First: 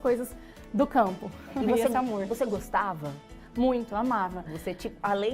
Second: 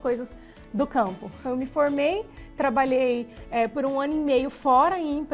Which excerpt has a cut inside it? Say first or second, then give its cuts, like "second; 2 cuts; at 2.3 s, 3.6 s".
second; 1 cut; at 1.4 s